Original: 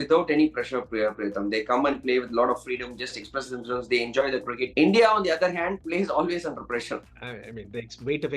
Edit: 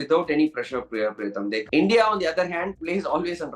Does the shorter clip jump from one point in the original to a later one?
yes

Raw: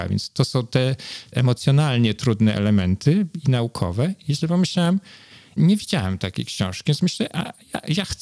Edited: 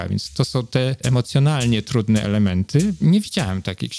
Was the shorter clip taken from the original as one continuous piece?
no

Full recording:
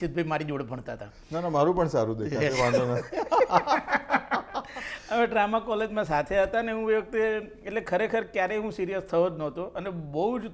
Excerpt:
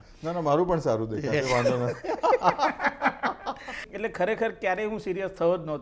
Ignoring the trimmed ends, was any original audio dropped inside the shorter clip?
yes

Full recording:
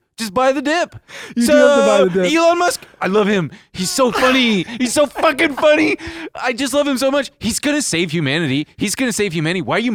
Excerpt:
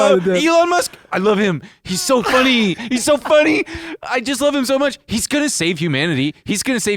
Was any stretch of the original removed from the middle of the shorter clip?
yes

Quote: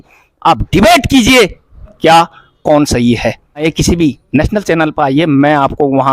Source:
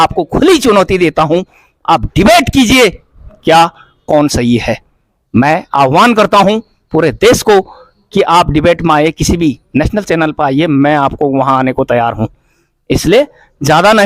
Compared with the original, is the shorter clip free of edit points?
no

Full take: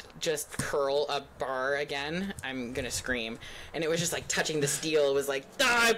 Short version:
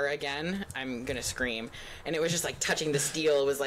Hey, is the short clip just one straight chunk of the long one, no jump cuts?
yes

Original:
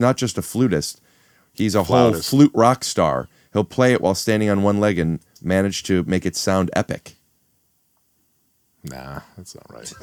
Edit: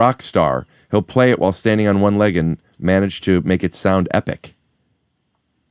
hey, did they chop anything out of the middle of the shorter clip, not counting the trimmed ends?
no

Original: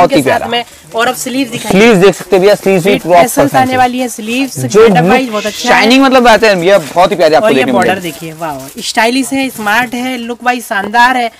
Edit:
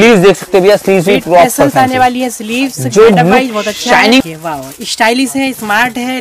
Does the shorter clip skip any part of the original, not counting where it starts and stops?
yes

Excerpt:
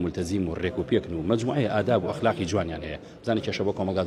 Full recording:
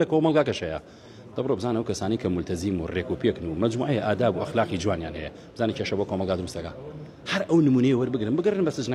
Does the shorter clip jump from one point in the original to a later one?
no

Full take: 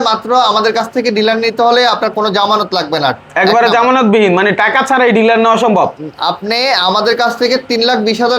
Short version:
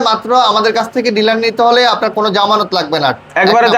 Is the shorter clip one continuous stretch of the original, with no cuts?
yes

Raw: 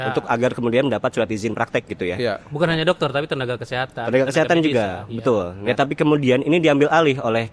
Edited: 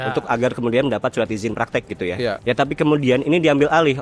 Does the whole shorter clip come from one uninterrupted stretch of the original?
no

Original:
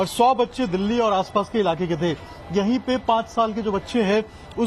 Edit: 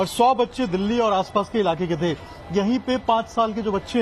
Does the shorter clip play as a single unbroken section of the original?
yes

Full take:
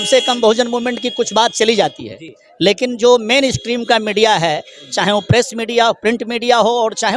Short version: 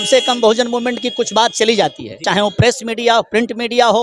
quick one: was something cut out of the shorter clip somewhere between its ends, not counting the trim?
yes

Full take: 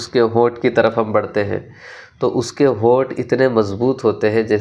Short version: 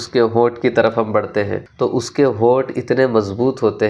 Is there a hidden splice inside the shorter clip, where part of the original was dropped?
yes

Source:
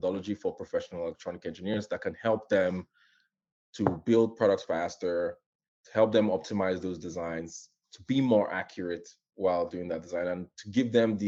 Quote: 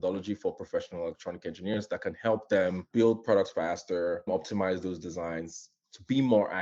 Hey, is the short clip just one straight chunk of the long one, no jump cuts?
no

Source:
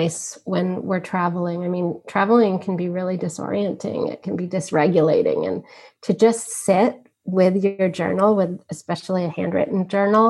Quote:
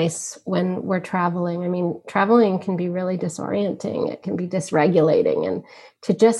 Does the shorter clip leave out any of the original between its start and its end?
no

